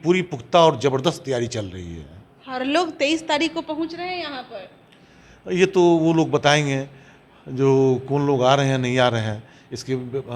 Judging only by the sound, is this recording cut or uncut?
uncut